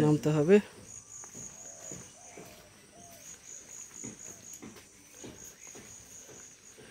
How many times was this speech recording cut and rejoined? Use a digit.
0